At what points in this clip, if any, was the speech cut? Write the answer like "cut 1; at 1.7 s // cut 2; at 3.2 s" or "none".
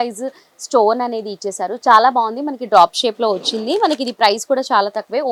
none